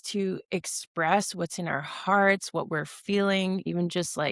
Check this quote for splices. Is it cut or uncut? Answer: uncut